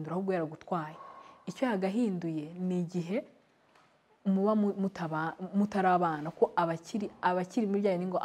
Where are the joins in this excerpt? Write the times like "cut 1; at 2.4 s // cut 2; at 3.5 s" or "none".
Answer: none